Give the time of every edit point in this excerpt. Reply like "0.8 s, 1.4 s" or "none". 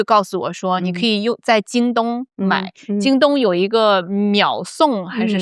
none